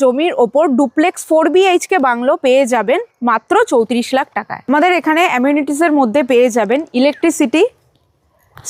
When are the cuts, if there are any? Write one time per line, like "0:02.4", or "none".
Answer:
none